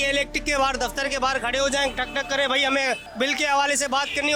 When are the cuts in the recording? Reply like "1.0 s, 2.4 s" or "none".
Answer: 3.1 s